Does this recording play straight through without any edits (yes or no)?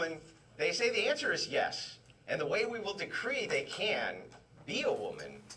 yes